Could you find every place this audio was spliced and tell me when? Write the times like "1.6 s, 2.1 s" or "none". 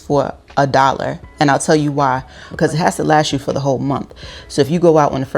2.4 s